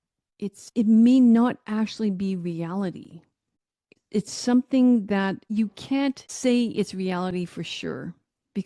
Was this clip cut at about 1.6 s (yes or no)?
no